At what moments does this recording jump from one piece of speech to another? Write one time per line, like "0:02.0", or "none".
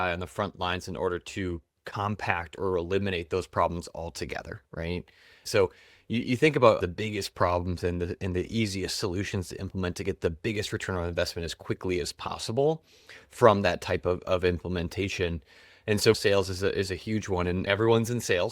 0:05.4
0:06.8
0:16.1
0:17.7